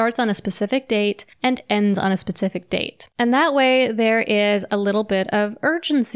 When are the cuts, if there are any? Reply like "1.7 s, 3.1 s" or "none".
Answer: 1.3 s, 3.0 s